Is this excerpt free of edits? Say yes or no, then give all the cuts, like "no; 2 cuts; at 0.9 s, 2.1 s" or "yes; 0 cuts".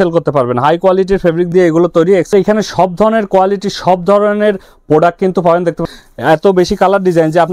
no; 2 cuts; at 2.3 s, 5.9 s